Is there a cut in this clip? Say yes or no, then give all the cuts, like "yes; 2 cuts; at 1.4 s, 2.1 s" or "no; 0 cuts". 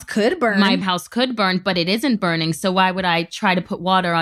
no; 0 cuts